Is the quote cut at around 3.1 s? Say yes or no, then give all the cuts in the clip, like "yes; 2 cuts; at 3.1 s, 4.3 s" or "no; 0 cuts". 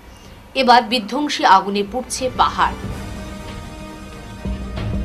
no; 0 cuts